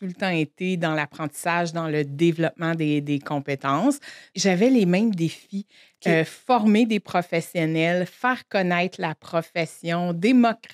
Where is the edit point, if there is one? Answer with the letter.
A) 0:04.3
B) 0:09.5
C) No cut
A